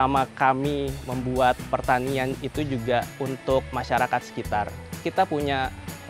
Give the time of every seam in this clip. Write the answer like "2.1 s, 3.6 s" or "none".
1.0 s, 1.7 s, 3.5 s, 5.0 s